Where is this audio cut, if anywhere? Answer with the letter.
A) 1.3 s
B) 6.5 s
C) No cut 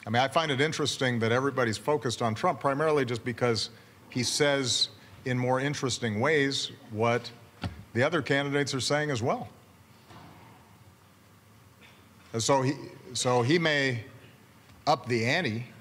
C